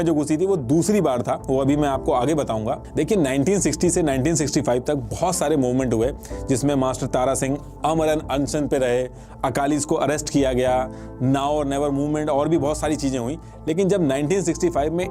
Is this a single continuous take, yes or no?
yes